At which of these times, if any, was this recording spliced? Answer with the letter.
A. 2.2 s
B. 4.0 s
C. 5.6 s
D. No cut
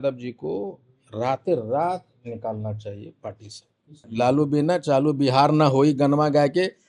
B